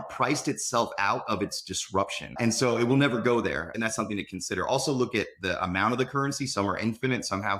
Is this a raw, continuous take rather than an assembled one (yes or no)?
no